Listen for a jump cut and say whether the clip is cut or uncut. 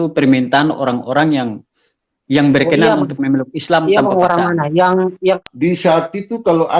cut